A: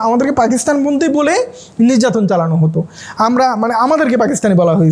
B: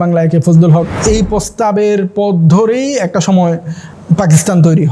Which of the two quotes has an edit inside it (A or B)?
B